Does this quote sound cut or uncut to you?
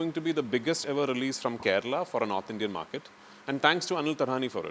uncut